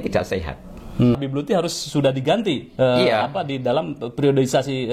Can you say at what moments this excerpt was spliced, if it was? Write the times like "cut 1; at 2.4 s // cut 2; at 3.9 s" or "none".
cut 1; at 1.2 s